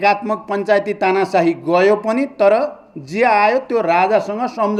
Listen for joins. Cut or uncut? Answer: uncut